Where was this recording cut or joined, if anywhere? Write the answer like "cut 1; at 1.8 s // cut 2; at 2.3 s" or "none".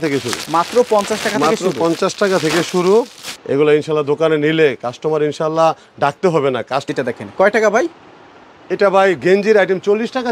cut 1; at 3.2 s // cut 2; at 6.9 s